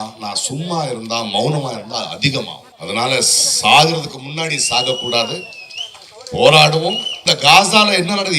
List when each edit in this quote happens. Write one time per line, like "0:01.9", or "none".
0:02.7
0:07.3